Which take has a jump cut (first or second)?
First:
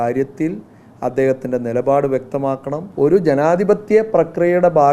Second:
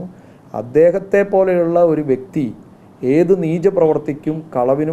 first